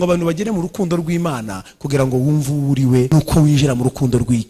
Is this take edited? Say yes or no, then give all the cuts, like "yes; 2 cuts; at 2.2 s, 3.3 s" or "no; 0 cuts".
yes; 1 cut; at 3.1 s